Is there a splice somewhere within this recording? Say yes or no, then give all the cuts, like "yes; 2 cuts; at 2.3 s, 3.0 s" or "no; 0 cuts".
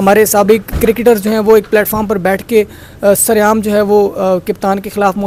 no; 0 cuts